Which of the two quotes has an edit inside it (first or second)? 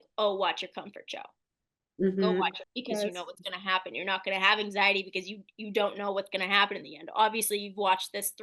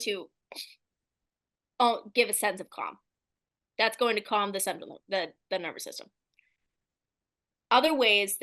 first